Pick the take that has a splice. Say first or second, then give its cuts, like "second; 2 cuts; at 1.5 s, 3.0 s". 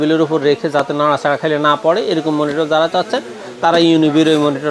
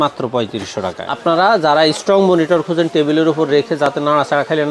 second; 1 cut; at 1.1 s